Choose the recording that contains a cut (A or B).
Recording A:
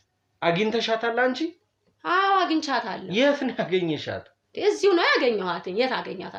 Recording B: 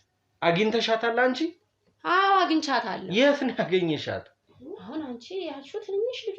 B